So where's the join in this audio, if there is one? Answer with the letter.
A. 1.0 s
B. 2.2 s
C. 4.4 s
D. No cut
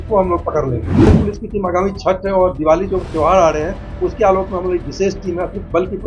A